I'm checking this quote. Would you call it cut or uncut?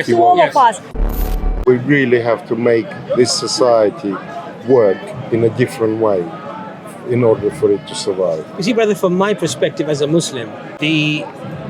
cut